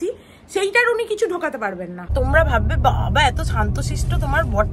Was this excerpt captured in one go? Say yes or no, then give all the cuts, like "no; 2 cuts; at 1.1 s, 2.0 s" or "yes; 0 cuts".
no; 1 cut; at 2.1 s